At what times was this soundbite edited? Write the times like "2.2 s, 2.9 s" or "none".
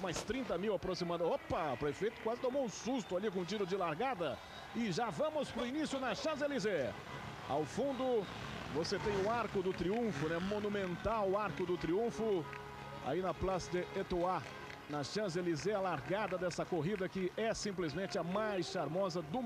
none